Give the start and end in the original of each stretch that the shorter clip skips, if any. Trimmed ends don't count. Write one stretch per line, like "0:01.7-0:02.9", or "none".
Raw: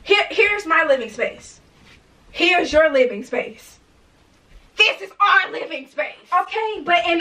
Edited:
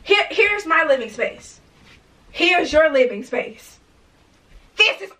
none